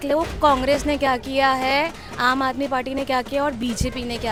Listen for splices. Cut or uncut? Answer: uncut